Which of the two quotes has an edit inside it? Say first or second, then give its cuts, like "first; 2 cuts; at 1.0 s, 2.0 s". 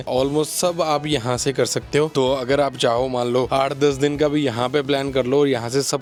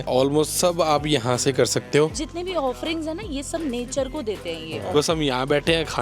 second; 2 cuts; at 2.1 s, 4.9 s